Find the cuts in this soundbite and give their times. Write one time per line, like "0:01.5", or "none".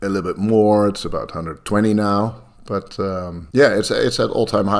0:03.4